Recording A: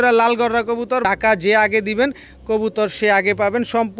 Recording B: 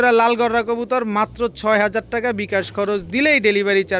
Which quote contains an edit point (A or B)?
A